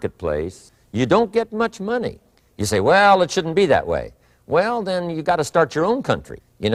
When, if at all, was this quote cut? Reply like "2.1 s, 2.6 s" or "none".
none